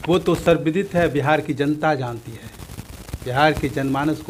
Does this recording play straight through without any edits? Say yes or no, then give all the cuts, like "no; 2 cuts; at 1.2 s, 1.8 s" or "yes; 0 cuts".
yes; 0 cuts